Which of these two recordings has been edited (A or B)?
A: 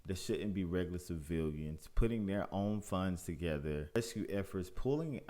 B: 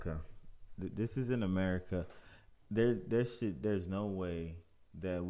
A